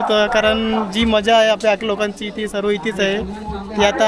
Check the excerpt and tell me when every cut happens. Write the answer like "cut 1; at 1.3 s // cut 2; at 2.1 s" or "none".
none